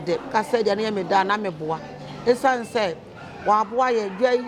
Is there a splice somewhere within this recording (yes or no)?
no